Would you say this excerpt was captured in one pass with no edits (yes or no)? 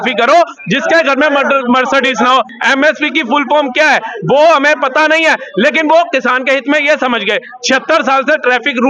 no